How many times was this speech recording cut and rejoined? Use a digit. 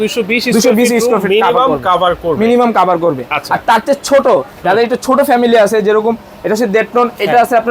0